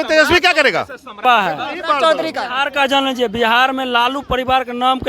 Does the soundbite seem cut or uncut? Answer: cut